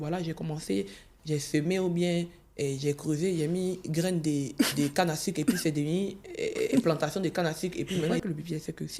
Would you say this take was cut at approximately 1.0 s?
yes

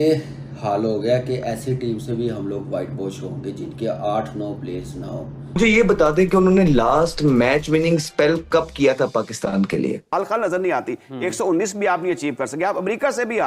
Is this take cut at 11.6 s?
no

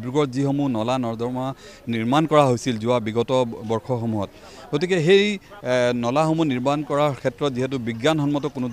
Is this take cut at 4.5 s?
no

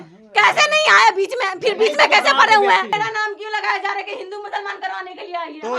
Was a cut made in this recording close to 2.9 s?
yes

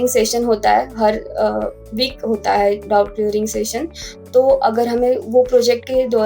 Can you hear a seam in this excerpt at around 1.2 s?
no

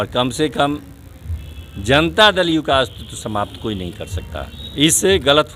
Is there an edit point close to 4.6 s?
yes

